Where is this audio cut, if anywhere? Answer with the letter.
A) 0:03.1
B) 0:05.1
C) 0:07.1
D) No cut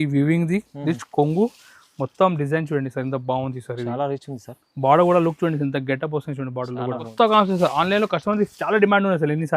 C